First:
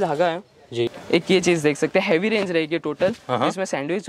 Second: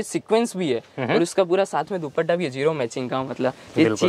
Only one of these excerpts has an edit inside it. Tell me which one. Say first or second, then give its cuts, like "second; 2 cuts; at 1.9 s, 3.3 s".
first; 1 cut; at 1.0 s